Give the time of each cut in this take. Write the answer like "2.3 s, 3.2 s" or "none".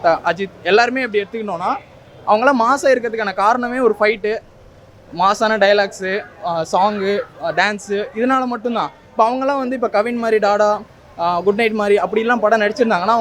none